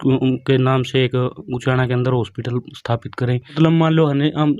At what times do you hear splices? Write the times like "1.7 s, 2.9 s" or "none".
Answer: 3.5 s